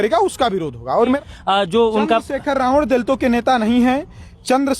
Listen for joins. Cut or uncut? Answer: cut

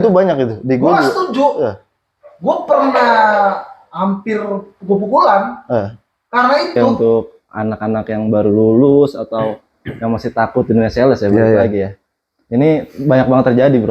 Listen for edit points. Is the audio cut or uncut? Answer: cut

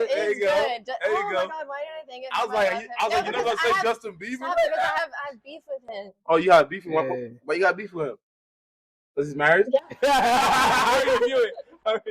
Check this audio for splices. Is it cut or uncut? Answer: cut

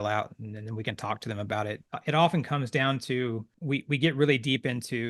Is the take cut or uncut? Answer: cut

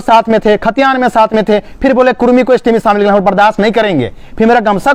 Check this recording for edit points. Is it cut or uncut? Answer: uncut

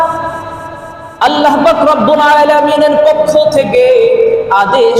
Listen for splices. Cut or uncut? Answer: uncut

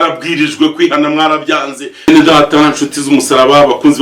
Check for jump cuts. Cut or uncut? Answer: cut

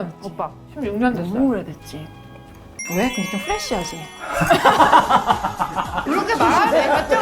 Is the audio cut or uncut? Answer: cut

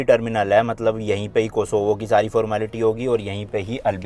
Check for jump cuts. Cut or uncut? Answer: uncut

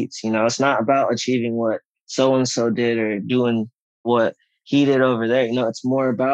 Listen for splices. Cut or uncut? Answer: cut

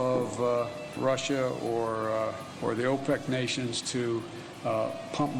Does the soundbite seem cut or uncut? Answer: cut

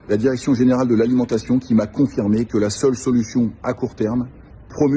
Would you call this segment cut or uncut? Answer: uncut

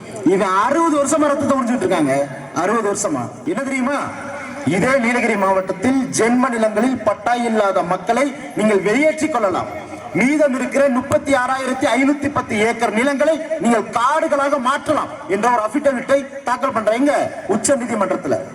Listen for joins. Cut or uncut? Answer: cut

